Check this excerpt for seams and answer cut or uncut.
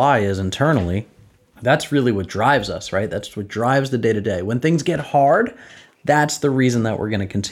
uncut